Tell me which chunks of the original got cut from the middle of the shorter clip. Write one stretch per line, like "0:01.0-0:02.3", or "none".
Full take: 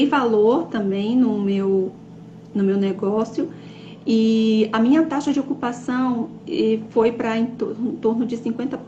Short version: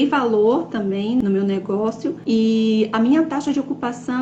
0:01.2-0:02.5
0:03.5-0:04.0